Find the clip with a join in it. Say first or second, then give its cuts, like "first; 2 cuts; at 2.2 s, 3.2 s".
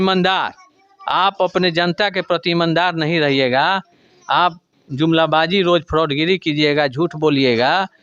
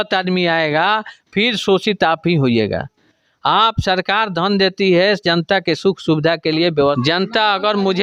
second; 1 cut; at 7.0 s